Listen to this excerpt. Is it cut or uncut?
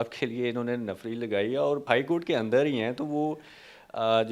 cut